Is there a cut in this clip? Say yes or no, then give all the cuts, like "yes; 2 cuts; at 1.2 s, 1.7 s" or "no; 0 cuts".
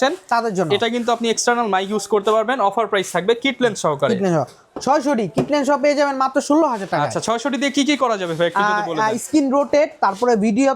no; 0 cuts